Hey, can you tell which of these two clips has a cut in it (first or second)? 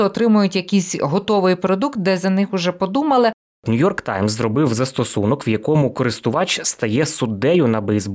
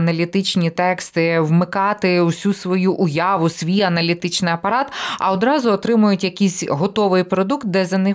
first